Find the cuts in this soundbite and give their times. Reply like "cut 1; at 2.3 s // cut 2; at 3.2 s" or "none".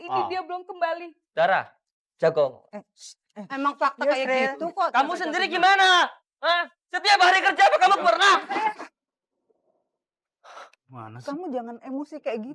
none